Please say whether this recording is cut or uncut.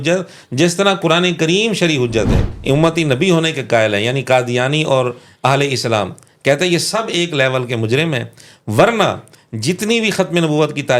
cut